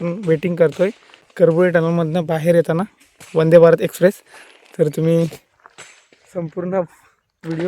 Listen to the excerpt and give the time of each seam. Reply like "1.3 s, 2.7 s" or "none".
1.4 s